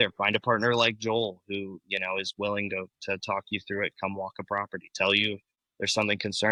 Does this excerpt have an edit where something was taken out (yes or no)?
no